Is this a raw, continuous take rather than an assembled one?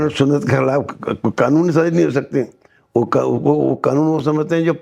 yes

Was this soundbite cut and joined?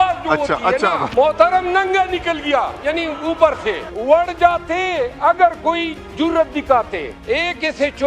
yes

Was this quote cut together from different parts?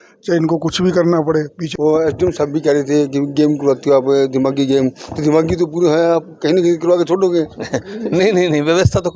yes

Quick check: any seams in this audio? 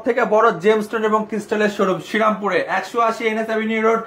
no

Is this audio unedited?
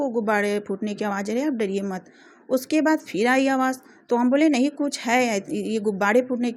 yes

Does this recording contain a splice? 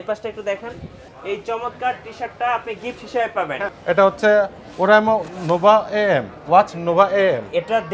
yes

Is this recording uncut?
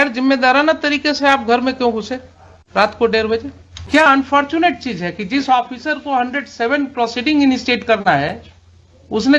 no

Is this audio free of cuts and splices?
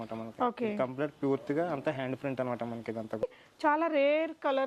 no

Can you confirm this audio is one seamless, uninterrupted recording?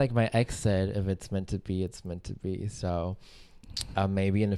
yes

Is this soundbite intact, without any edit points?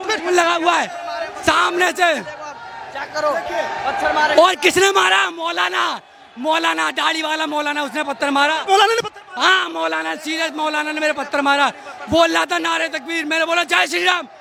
yes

